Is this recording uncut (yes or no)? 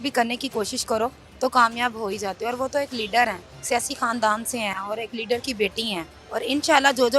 no